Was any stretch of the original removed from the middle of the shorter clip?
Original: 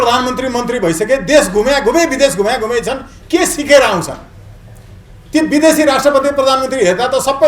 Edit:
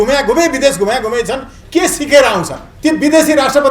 yes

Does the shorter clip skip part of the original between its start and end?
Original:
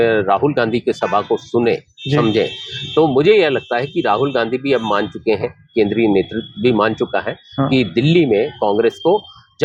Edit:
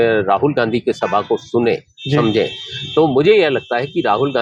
no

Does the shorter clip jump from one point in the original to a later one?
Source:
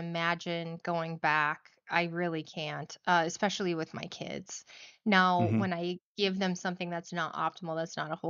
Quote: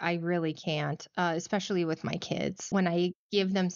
yes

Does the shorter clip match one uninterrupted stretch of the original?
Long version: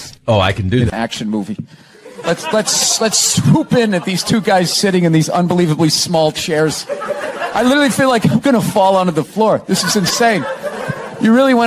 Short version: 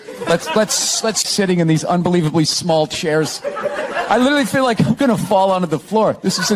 no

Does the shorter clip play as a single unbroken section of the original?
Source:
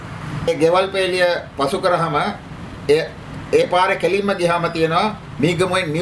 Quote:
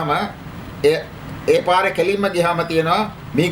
yes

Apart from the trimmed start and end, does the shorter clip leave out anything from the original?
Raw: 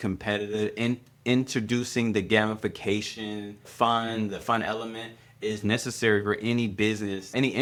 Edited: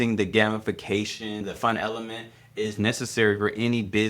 yes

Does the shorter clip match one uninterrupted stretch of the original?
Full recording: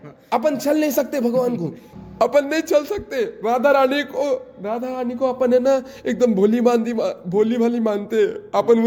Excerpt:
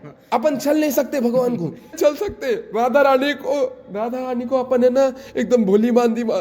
no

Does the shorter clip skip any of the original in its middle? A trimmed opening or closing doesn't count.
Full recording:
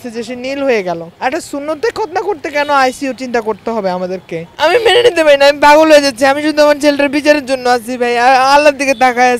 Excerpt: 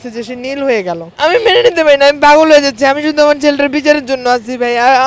yes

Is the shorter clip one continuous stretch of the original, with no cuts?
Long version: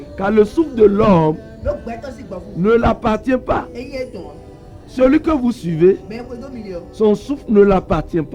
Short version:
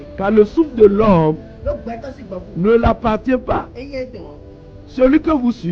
yes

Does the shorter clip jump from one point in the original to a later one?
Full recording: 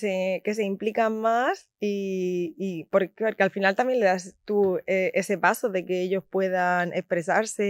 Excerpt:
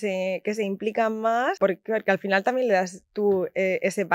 yes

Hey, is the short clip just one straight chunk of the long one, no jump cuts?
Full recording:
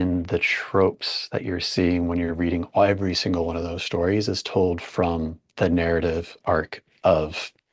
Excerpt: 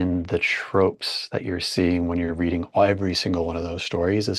yes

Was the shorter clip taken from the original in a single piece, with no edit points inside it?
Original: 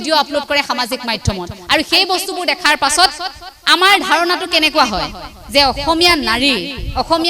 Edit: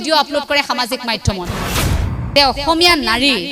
no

